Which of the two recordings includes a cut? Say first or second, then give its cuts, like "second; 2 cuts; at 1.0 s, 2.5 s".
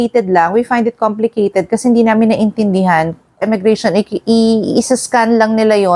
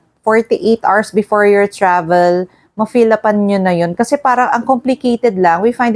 first; 1 cut; at 3.4 s